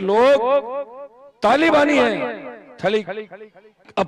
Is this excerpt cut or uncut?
uncut